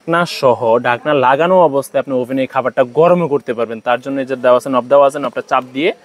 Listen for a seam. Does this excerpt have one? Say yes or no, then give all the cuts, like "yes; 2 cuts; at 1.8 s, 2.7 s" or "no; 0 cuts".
no; 0 cuts